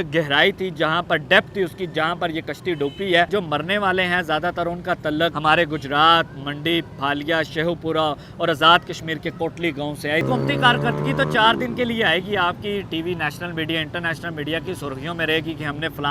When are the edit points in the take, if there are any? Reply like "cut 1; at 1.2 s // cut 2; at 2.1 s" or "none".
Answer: cut 1; at 3.3 s // cut 2; at 5.4 s // cut 3; at 10.2 s